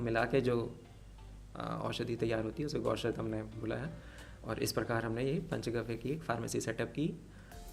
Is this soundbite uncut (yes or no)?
yes